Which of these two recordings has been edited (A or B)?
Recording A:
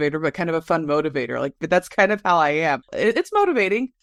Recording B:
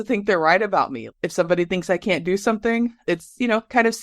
B